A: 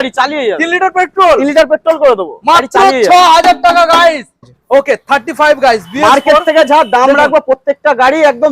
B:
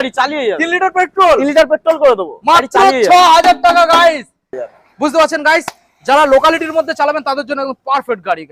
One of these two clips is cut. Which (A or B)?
A